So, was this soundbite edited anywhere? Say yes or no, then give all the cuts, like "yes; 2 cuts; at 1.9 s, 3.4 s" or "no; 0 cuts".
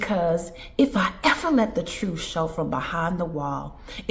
no; 0 cuts